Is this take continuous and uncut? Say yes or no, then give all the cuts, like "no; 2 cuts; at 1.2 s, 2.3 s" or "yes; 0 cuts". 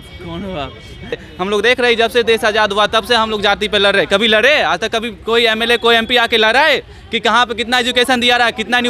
no; 1 cut; at 1.3 s